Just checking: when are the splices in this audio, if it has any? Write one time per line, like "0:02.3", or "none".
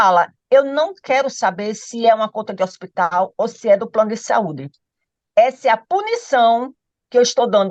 none